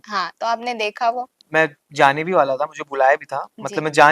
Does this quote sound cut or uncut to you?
cut